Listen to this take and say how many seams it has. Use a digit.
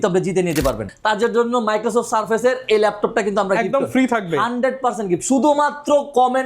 1